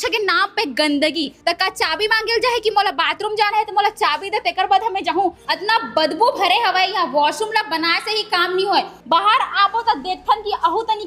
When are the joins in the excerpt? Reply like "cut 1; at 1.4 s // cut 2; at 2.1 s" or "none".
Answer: cut 1; at 1.3 s // cut 2; at 5.4 s // cut 3; at 9.0 s